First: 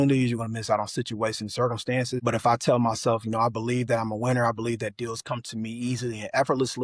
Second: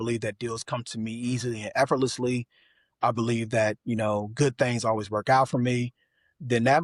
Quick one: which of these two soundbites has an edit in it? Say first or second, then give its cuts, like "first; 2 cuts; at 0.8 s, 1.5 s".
first; 1 cut; at 2.2 s